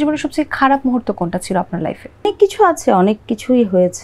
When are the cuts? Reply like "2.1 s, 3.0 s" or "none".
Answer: none

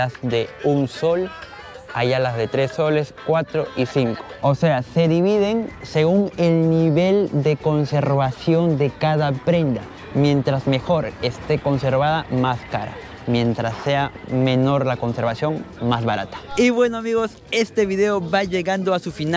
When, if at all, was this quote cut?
none

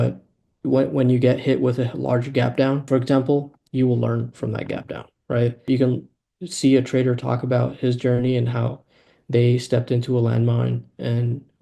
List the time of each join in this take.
2.8 s, 5.6 s

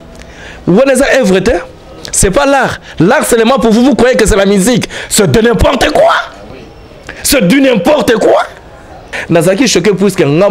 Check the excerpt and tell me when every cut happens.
9.1 s

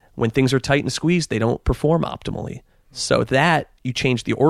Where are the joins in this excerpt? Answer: 3.0 s

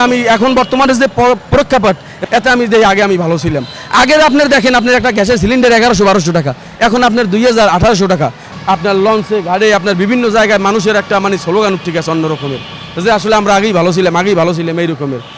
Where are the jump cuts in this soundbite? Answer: 2.1 s, 8.5 s

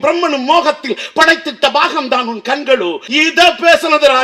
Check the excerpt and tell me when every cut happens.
3.0 s

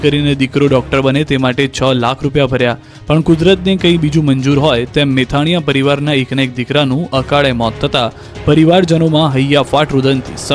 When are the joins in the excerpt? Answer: 3.6 s

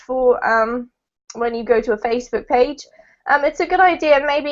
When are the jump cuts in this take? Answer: 3.5 s

